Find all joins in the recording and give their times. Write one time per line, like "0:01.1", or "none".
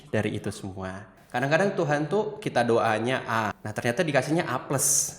0:01.1
0:03.6